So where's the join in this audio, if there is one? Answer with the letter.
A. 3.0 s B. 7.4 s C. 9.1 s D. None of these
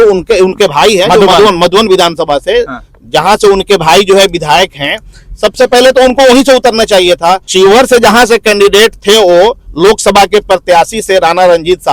B